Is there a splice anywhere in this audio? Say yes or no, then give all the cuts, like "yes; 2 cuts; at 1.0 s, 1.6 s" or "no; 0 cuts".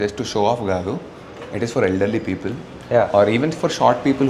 no; 0 cuts